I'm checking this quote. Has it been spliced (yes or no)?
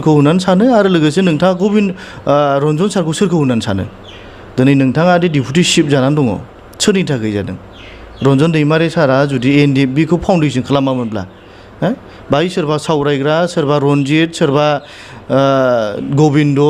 no